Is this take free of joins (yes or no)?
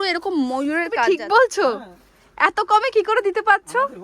no